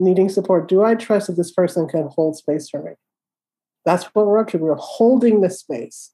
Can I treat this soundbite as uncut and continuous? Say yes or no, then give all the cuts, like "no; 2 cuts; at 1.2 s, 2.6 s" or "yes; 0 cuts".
no; 1 cut; at 3.7 s